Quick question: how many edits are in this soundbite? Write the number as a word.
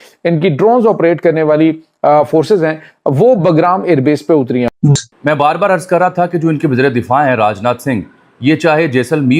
one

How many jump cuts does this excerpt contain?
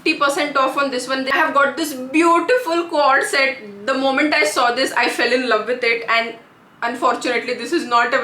one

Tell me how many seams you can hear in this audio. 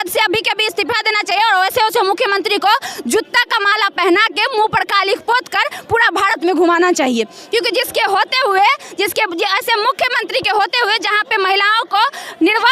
zero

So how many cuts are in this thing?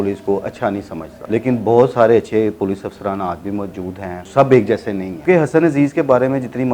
three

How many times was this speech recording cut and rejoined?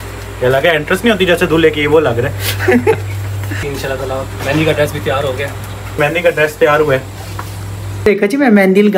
three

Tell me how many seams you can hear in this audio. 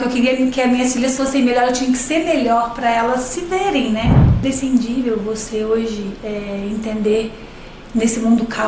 one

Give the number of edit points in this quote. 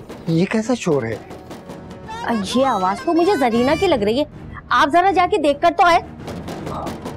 zero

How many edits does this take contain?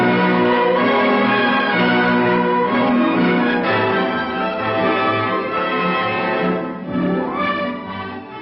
one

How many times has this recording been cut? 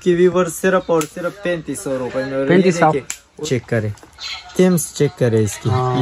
one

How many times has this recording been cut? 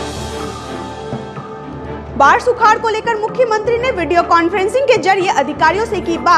zero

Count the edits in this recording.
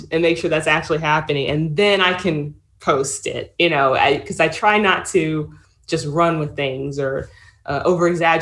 zero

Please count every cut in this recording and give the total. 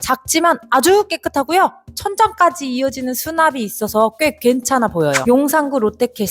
one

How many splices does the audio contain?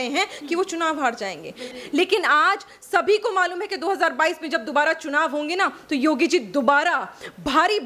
one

